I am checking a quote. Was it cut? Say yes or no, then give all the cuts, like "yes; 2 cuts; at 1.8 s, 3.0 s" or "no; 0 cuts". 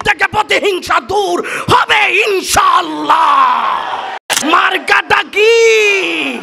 yes; 1 cut; at 4.2 s